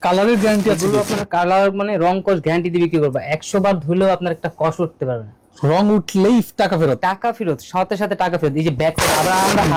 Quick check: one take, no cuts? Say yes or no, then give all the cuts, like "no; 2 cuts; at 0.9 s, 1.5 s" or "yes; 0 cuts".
yes; 0 cuts